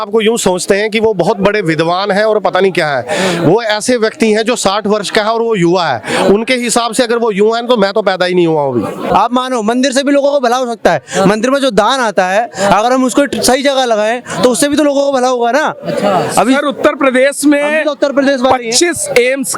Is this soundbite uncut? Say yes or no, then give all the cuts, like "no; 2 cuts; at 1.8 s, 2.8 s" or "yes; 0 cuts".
no; 1 cut; at 9.1 s